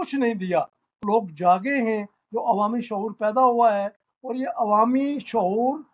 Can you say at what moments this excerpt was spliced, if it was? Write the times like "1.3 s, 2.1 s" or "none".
1.0 s